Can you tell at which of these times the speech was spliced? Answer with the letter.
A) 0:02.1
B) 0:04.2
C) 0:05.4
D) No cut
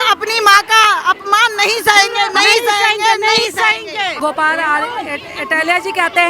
B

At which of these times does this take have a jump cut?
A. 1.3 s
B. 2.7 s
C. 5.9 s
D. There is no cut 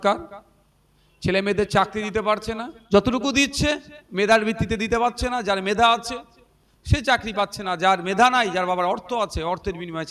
B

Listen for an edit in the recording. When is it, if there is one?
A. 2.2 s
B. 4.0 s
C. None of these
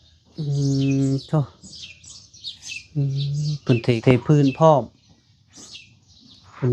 B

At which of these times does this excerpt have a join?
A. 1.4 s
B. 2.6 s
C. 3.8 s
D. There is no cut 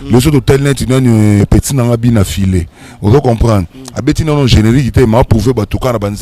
A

